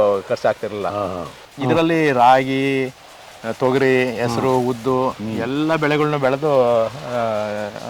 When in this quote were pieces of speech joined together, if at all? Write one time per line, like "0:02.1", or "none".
0:01.5